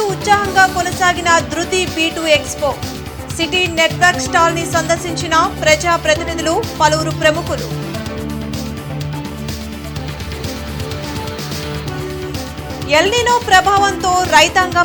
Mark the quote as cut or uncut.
uncut